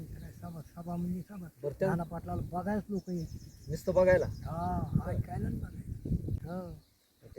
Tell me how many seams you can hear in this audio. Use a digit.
1